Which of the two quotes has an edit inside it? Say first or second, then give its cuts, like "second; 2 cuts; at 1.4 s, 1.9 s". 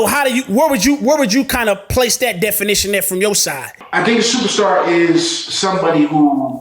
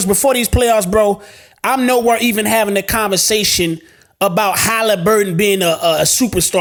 first; 1 cut; at 3.7 s